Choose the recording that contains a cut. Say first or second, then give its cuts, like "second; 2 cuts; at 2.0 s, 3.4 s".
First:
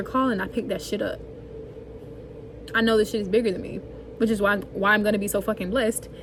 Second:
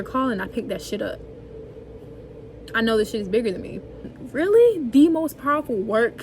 second; 1 cut; at 4.1 s